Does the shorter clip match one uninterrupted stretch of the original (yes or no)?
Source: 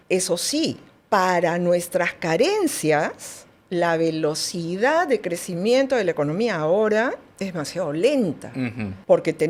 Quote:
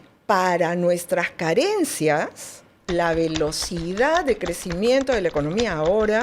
yes